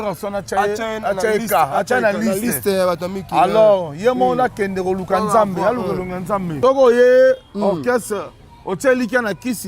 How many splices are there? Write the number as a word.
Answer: one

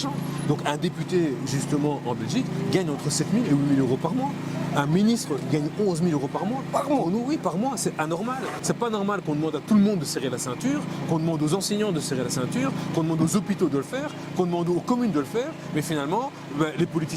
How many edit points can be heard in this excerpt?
one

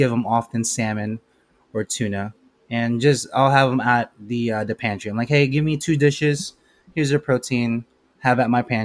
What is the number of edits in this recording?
zero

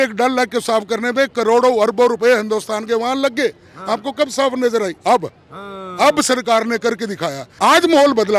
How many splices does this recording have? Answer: one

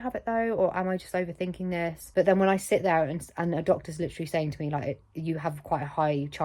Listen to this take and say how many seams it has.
one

